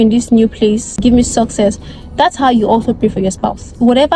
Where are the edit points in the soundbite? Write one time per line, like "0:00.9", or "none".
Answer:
0:01.0